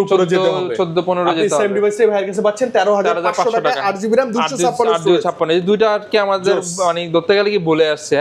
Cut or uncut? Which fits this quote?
uncut